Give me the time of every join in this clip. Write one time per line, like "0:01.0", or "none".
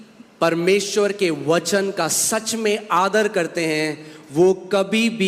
none